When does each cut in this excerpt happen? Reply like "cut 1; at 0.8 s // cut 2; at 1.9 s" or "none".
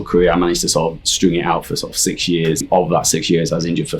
cut 1; at 2.7 s